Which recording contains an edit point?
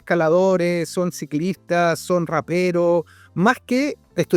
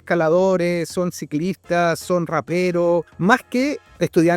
second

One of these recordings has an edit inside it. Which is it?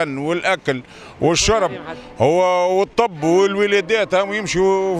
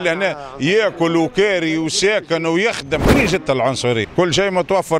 second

